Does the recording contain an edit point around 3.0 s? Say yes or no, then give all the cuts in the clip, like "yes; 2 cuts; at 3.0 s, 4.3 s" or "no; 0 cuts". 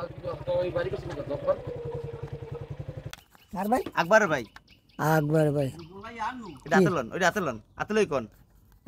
yes; 1 cut; at 3.0 s